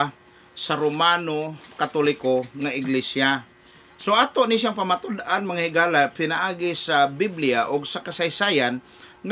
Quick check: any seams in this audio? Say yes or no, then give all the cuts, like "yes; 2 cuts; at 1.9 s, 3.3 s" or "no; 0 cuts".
no; 0 cuts